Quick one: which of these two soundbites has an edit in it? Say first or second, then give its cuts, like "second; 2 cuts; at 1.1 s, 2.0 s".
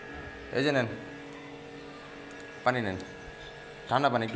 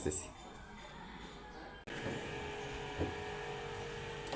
second; 1 cut; at 1.9 s